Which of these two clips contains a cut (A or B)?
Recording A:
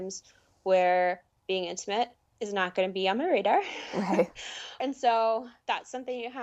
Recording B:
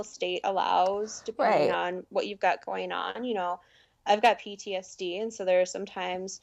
A